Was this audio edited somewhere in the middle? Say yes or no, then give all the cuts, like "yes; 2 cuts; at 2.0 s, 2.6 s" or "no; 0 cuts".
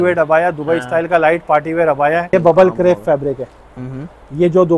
yes; 1 cut; at 2.3 s